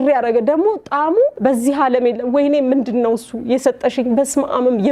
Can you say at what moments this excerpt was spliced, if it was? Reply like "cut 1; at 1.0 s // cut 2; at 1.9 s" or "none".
cut 1; at 1.4 s